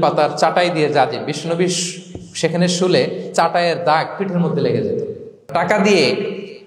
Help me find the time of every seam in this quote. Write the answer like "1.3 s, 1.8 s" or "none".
5.5 s